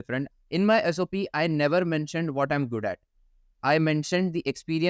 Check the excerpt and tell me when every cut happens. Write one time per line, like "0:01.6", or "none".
none

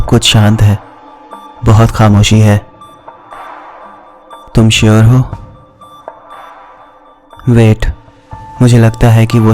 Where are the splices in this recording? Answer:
0:02.6
0:04.3
0:05.3
0:07.4

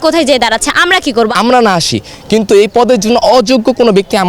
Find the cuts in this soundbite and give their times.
0:01.3

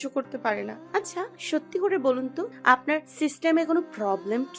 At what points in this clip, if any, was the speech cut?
0:01.4
0:02.8

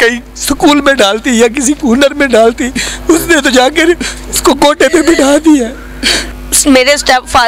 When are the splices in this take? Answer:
0:06.5

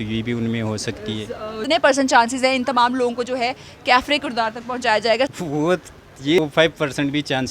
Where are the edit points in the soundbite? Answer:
0:01.6
0:05.3
0:06.4

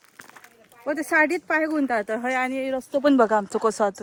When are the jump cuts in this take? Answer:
none

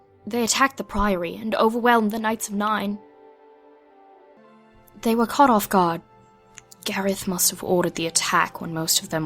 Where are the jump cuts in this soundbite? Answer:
0:04.4

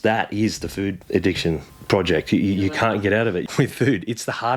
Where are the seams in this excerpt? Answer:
0:01.0
0:01.7
0:03.4

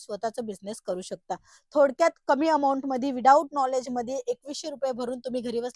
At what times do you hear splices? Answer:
none

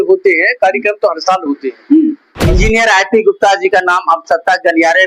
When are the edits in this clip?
0:02.5

